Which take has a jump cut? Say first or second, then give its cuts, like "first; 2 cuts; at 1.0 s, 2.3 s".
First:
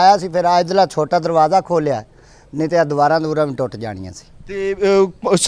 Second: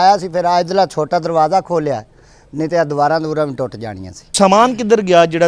second; 1 cut; at 4.3 s